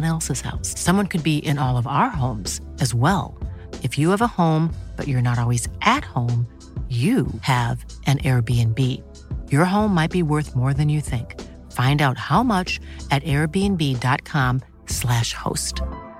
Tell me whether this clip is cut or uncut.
uncut